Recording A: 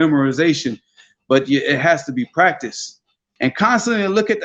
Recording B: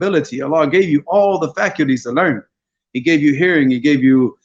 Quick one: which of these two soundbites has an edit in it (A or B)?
A